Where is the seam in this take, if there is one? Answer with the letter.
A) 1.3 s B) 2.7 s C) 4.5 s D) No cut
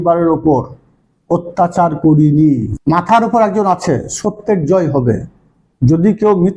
B